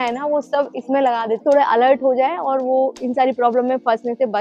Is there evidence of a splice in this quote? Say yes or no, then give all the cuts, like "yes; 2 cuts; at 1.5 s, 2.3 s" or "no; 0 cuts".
yes; 1 cut; at 1.4 s